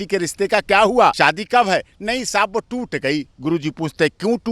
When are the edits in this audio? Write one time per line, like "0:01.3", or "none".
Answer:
0:01.1